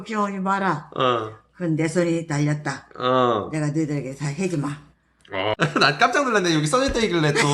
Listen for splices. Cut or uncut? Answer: cut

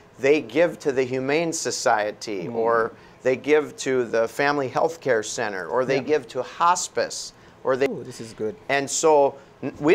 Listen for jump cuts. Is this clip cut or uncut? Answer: cut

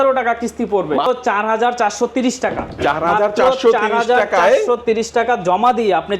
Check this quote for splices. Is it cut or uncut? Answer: cut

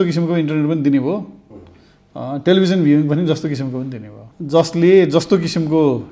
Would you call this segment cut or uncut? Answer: cut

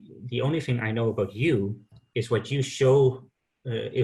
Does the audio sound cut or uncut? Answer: uncut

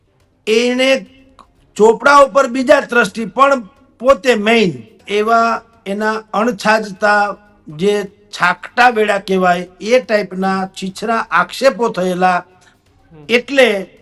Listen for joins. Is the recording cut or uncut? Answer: cut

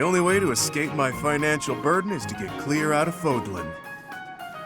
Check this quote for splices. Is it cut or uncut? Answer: cut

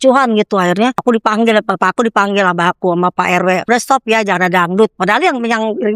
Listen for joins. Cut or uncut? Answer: cut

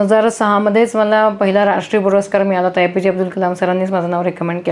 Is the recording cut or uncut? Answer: uncut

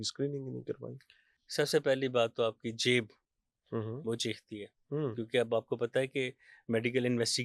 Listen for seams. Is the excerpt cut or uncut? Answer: uncut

